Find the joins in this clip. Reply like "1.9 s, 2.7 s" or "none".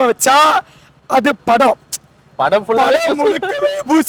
none